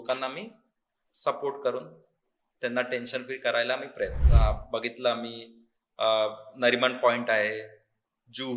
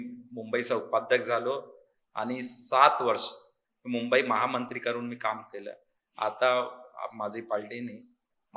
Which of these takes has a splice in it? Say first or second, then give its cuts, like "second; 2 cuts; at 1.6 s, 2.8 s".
first; 1 cut; at 4.2 s